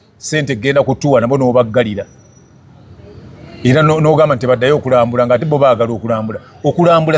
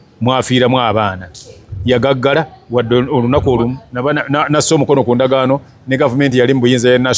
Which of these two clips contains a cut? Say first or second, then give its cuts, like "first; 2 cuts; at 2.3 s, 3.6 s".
second; 1 cut; at 3.8 s